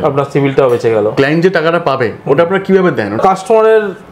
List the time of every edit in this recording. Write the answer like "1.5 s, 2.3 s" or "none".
1.1 s, 3.2 s